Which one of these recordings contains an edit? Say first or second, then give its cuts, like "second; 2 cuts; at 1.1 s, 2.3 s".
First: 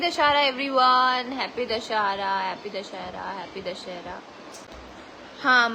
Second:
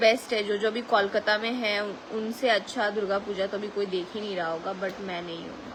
first; 1 cut; at 4.5 s